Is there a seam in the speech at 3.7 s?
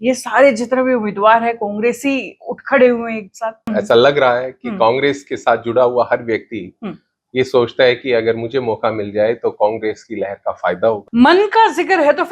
yes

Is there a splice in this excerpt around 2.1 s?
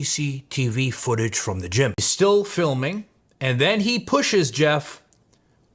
yes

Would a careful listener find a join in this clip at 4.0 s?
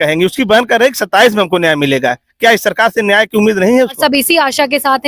yes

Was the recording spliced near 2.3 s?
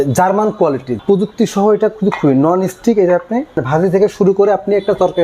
no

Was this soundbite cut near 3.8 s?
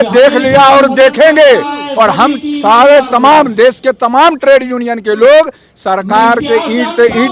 no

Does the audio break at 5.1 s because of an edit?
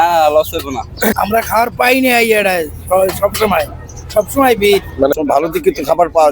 yes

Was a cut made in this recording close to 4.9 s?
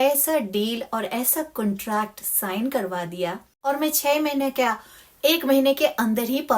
no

